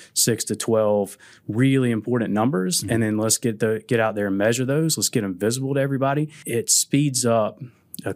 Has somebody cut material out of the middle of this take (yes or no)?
yes